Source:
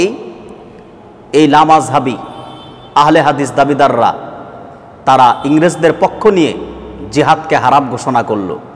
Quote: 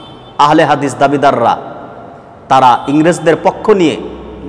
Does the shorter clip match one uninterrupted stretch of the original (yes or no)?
yes